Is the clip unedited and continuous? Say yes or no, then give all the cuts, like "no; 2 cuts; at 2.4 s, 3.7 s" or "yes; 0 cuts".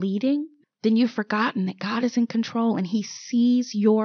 yes; 0 cuts